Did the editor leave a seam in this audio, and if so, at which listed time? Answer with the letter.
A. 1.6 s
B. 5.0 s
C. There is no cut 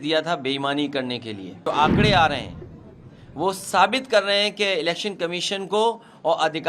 A